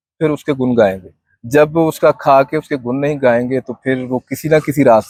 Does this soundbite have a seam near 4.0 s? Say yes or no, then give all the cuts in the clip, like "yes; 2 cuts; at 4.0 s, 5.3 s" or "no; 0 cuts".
no; 0 cuts